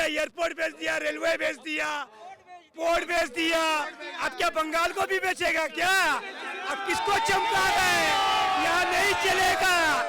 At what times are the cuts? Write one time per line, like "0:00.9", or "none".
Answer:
none